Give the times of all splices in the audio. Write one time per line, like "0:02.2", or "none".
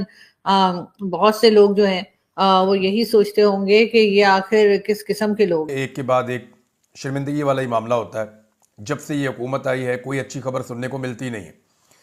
0:05.8